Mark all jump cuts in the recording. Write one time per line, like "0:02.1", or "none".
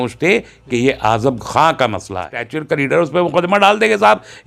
0:02.5